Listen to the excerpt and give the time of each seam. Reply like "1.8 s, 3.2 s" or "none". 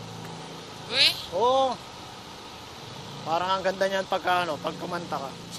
none